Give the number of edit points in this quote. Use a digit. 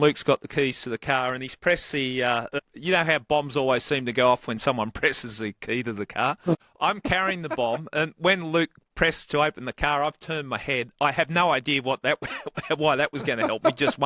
2